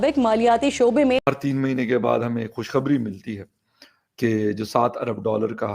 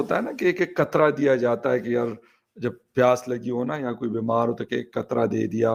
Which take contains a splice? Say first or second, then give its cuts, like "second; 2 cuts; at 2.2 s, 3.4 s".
first; 1 cut; at 1.2 s